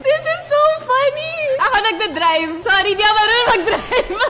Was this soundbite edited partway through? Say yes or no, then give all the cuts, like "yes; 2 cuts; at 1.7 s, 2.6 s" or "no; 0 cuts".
yes; 1 cut; at 2.6 s